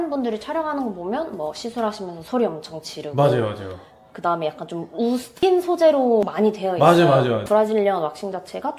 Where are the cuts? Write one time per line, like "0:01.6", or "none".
0:07.4

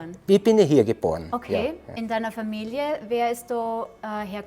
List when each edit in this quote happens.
0:01.9

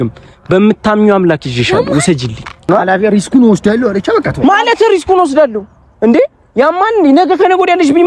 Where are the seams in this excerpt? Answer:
0:02.6

